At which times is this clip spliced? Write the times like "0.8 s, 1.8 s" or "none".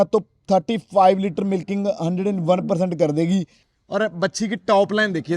3.6 s